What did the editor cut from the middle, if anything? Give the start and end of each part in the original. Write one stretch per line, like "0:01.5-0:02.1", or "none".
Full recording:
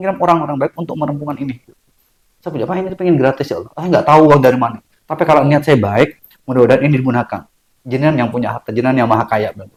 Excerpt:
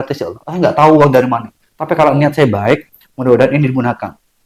none